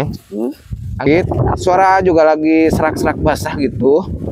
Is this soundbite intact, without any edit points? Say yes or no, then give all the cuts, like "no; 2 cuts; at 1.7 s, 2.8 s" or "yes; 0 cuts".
no; 1 cut; at 1.1 s